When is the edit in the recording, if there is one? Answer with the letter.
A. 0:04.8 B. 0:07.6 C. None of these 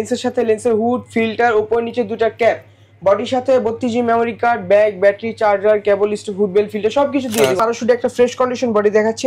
B